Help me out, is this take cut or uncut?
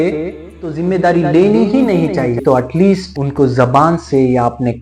cut